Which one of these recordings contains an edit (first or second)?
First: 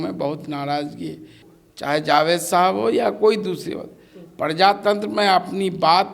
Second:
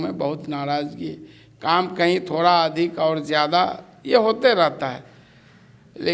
first